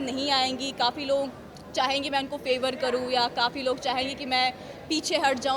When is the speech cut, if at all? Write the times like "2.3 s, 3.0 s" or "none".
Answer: none